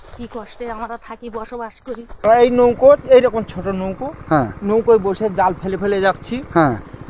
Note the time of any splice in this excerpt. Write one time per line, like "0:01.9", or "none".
0:02.2